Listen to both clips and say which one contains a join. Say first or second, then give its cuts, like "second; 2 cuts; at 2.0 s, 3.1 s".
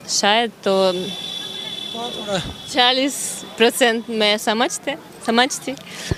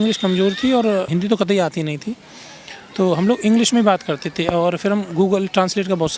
second; 1 cut; at 1.1 s